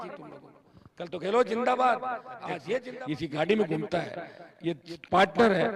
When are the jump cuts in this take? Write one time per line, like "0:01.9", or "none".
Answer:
0:02.9

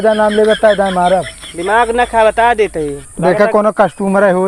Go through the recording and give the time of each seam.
none

